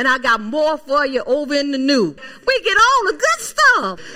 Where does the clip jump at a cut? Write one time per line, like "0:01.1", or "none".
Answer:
0:02.2